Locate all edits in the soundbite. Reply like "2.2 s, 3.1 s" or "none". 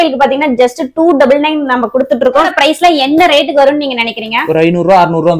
2.5 s